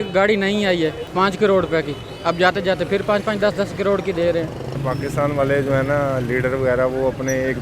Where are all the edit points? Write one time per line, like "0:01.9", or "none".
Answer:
0:01.0
0:04.8